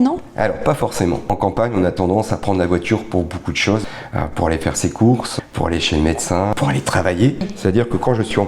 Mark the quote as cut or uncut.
cut